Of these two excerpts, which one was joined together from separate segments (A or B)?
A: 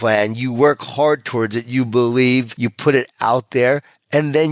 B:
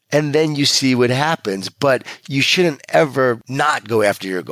B